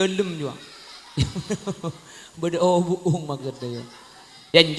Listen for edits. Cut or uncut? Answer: uncut